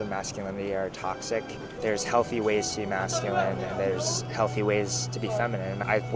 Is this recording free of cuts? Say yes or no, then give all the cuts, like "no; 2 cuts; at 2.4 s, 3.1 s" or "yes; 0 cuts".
no; 1 cut; at 1.7 s